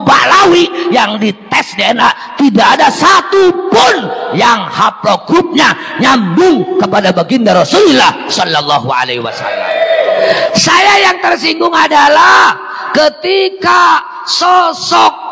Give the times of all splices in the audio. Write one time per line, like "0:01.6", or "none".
0:09.6